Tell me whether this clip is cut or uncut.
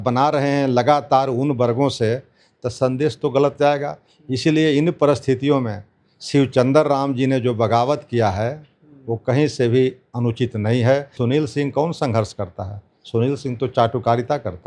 cut